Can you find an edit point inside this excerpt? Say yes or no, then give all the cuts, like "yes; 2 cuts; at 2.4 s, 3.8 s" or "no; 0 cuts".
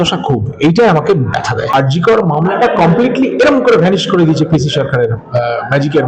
yes; 1 cut; at 1.7 s